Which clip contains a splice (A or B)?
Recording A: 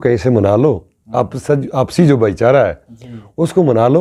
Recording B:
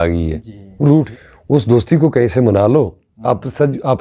B